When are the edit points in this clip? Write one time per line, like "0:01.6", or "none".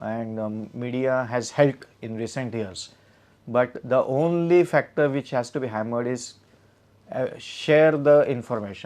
none